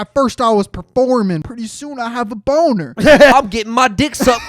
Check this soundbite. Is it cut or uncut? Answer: cut